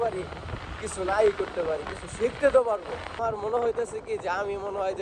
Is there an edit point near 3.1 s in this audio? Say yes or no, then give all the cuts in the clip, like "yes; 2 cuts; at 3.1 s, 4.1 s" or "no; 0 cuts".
yes; 1 cut; at 3.1 s